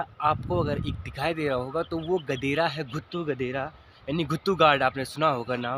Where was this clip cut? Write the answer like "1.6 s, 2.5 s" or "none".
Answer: none